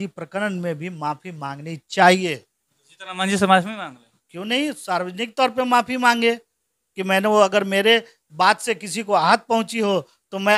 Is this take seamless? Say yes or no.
yes